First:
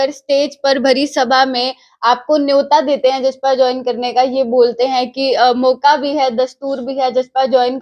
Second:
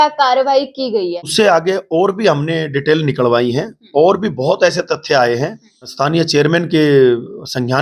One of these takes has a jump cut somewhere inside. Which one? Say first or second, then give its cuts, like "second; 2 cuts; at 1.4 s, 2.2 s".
second; 2 cuts; at 1.3 s, 5.9 s